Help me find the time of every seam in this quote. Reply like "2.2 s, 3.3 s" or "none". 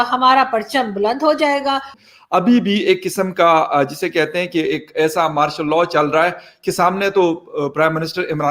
1.9 s